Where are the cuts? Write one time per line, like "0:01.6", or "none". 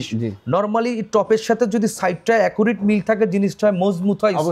none